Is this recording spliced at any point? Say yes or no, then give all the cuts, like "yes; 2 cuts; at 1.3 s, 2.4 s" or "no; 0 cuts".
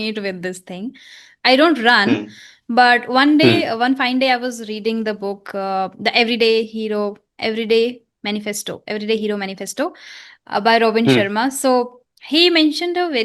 no; 0 cuts